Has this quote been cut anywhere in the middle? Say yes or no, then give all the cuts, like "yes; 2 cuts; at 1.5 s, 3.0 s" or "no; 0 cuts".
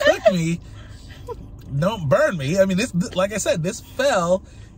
no; 0 cuts